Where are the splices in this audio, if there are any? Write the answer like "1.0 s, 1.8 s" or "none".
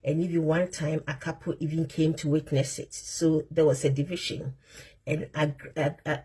none

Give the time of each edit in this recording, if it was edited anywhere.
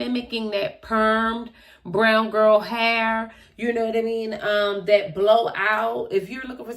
none

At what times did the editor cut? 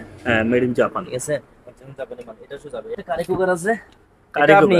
3.0 s

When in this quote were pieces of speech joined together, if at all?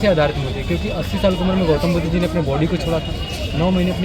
none

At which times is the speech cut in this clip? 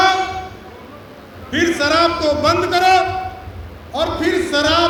none

